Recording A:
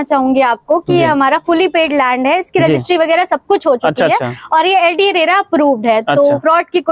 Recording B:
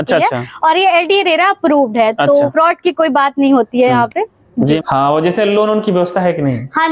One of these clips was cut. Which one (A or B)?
B